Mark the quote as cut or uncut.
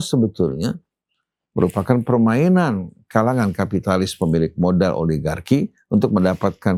uncut